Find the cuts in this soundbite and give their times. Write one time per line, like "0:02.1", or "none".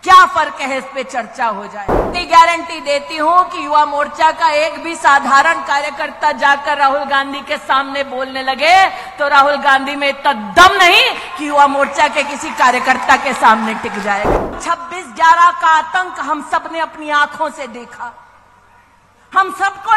0:02.1
0:14.6